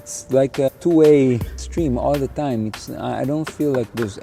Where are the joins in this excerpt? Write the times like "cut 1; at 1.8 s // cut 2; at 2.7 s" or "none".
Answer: cut 1; at 0.7 s // cut 2; at 1.6 s